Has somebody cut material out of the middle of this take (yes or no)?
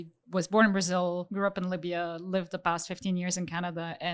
yes